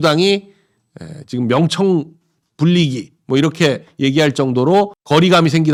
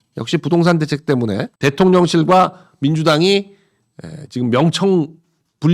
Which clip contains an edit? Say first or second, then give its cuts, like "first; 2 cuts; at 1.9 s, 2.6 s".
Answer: second; 1 cut; at 1.5 s